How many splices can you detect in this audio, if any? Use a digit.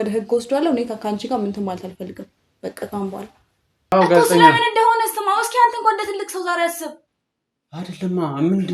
1